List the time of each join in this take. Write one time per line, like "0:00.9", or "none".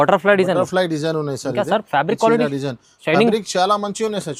none